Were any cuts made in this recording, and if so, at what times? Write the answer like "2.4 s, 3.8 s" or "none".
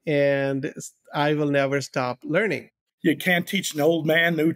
2.9 s